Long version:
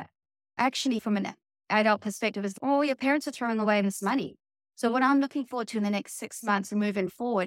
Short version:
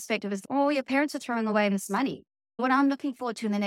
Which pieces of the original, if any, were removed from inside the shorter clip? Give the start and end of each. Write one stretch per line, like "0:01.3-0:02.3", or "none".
0:04.7-0:04.9